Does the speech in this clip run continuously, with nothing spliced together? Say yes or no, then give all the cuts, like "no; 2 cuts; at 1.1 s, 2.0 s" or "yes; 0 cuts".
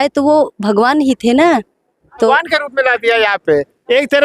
no; 1 cut; at 2.3 s